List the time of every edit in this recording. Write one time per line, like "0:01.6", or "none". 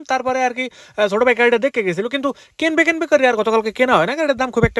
none

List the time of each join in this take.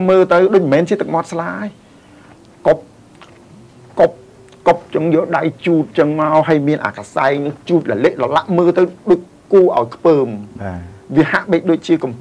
none

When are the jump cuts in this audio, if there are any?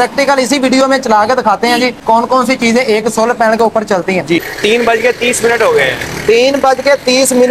0:02.0
0:04.4

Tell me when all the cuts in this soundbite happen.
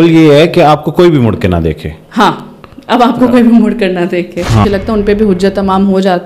0:04.6

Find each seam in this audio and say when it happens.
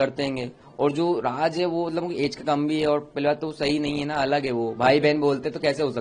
none

